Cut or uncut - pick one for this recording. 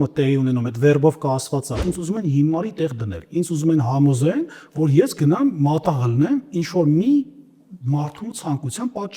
cut